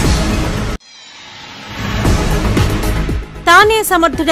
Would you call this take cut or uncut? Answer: cut